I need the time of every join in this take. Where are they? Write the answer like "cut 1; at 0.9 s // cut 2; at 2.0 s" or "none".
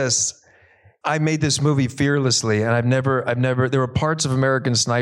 cut 1; at 0.9 s